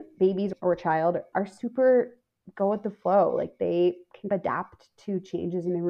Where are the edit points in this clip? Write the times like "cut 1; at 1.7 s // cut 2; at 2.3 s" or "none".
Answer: none